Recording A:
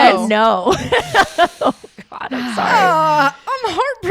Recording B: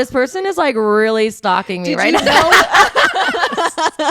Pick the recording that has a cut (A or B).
B